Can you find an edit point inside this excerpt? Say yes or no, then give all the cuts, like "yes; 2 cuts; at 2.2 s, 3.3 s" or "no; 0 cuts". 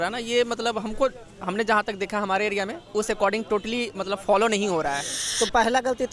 yes; 1 cut; at 5.2 s